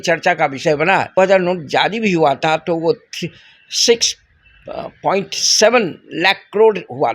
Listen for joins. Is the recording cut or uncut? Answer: cut